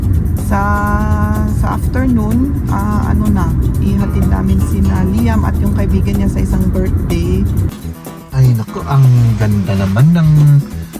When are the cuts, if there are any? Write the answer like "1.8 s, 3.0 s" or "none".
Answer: 7.7 s